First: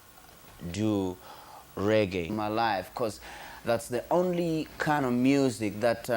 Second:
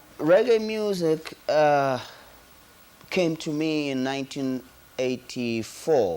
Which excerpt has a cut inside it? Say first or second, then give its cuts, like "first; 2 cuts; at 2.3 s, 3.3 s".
first; 1 cut; at 2.3 s